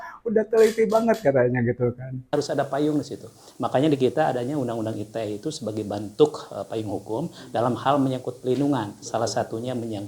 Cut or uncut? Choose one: cut